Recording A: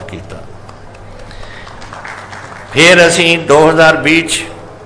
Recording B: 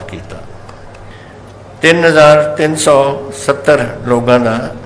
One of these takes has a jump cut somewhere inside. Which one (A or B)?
B